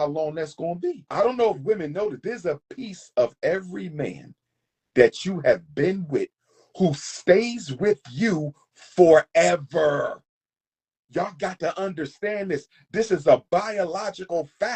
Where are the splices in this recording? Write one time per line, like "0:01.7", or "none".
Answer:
0:01.0